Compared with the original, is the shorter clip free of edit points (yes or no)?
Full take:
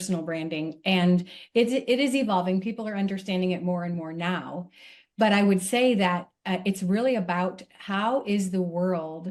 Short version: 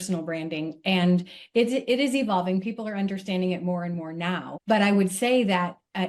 no